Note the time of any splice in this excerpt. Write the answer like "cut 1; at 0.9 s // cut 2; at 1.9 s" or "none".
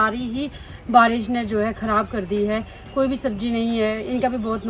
none